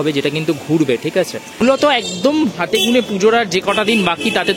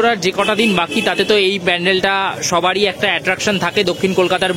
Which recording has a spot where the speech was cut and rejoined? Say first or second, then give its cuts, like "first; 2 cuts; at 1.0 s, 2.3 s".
first; 1 cut; at 1.7 s